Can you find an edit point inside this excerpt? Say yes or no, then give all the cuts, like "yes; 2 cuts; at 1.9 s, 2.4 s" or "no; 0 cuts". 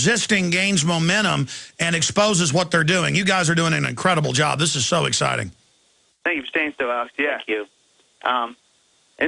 yes; 1 cut; at 7.1 s